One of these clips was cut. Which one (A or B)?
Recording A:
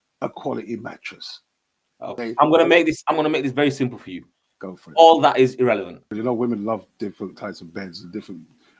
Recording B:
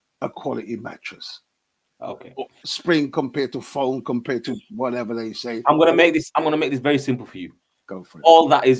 A